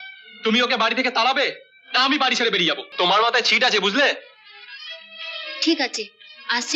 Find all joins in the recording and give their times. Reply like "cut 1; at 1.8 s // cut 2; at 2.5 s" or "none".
cut 1; at 2.9 s